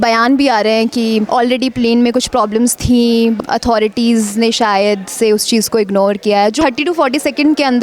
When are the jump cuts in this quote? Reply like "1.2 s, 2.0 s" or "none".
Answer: 1.3 s, 3.4 s, 6.6 s

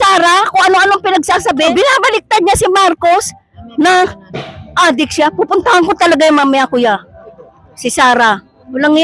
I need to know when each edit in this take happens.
1.7 s

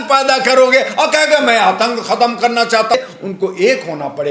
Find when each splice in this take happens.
2.9 s

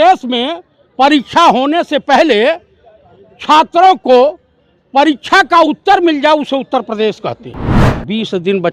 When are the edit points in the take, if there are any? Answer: 7.8 s

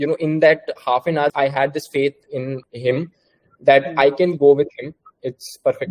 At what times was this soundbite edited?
1.3 s, 2.6 s

